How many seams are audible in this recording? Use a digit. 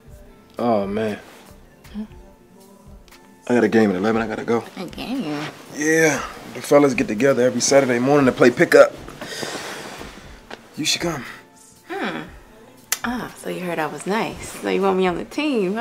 1